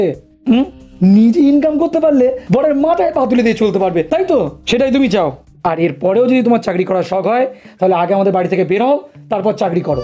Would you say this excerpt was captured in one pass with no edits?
no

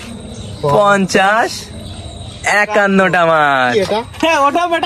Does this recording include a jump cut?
no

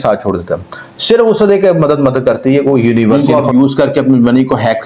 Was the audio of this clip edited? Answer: yes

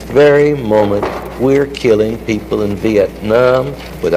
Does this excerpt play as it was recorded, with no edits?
no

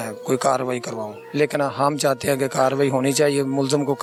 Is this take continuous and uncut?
yes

